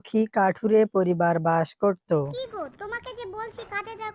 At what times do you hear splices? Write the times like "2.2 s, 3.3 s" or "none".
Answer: 2.4 s